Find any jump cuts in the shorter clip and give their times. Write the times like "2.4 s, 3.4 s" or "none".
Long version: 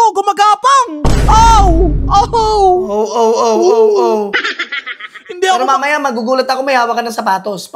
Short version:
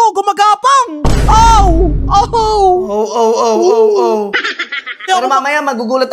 5.1 s